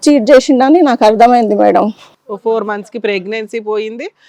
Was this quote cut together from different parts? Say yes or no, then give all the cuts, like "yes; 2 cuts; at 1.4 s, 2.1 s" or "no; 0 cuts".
no; 0 cuts